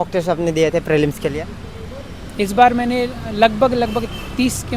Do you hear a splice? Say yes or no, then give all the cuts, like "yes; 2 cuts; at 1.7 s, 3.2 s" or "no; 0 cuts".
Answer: no; 0 cuts